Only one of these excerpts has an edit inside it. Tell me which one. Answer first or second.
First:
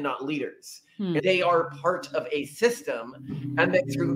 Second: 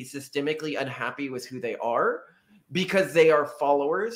first